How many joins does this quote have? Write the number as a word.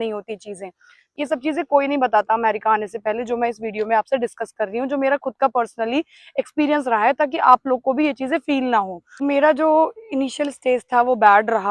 two